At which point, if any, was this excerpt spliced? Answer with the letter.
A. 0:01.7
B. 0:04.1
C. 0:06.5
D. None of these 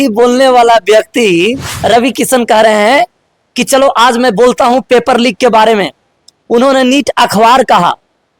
A